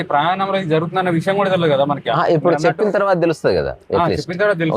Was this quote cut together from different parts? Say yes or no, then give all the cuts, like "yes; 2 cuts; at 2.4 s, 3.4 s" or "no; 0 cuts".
no; 0 cuts